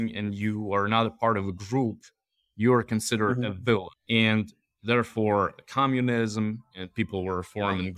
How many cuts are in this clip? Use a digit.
1